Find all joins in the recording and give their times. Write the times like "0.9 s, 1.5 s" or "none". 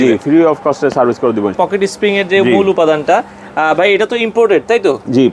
1.5 s